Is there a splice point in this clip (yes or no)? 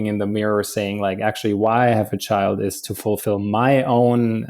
yes